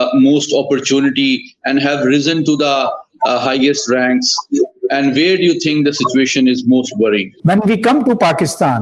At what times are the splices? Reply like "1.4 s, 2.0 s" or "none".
7.3 s